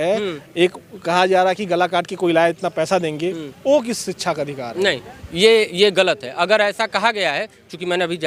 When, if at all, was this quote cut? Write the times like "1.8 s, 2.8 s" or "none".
none